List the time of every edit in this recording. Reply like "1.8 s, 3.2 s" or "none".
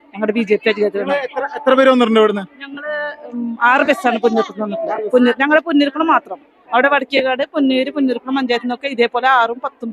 none